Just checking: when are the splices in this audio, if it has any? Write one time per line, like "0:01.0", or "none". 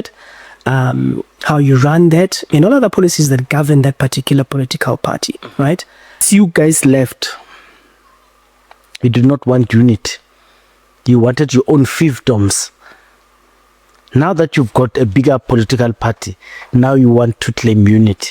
0:06.2

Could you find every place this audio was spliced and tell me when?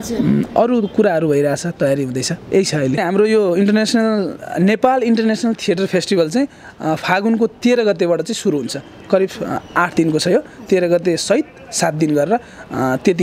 0:03.0

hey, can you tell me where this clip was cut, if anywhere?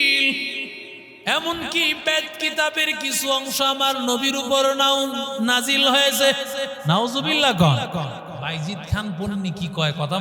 0:08.3

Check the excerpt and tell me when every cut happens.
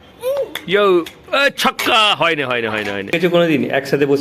0:03.1

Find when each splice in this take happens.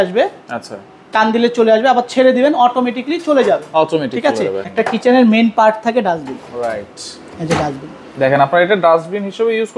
0:04.6

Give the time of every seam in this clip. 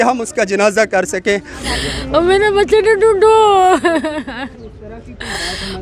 0:01.6

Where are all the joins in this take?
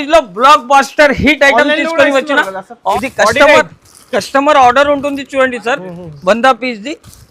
0:02.8

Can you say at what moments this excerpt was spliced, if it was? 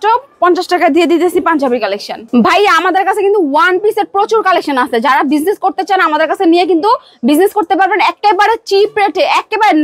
none

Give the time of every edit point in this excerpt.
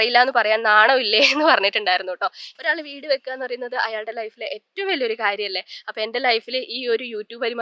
0:02.5

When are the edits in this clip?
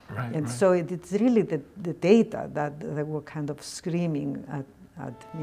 none

